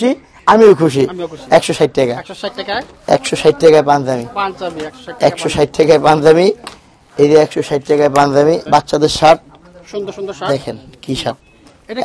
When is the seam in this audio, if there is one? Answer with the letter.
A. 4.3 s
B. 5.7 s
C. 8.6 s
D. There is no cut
C